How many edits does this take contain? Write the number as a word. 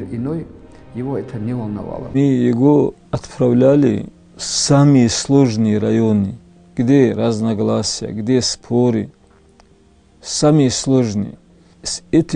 one